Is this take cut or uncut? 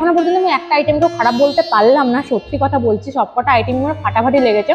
uncut